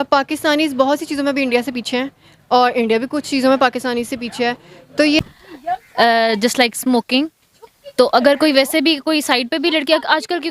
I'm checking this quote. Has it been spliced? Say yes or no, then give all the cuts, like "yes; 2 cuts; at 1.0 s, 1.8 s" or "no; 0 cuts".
yes; 1 cut; at 5.2 s